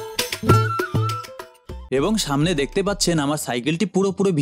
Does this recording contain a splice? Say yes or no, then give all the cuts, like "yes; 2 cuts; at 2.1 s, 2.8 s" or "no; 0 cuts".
yes; 1 cut; at 1.6 s